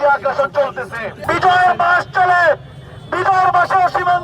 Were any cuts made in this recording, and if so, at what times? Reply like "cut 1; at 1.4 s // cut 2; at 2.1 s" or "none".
cut 1; at 1.1 s